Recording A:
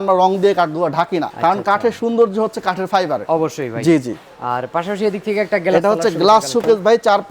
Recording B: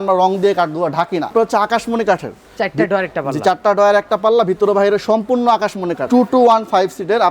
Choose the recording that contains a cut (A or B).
B